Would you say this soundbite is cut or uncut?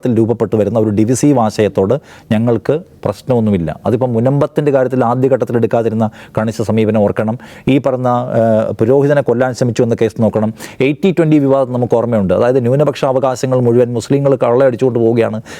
uncut